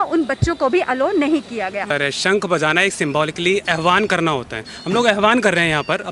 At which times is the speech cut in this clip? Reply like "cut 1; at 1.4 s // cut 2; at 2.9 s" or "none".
cut 1; at 1.9 s